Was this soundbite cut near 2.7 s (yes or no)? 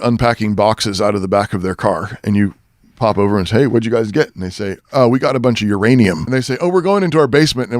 no